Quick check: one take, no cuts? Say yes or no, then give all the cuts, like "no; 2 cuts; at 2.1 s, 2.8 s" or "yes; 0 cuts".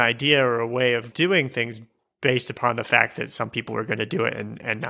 no; 1 cut; at 1.1 s